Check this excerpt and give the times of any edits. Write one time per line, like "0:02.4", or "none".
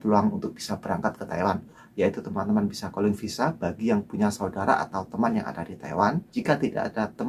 0:01.8
0:06.3